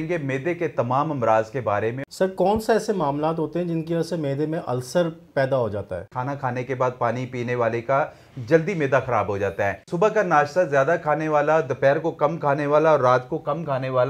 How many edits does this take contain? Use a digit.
3